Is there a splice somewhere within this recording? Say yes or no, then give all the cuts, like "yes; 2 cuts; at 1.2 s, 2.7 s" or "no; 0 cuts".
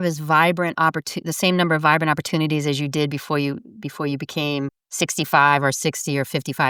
no; 0 cuts